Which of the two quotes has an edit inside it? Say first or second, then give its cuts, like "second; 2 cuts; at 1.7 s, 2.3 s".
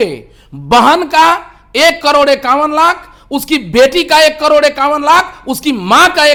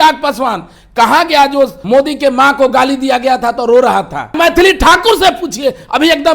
second; 2 cuts; at 1.8 s, 4.3 s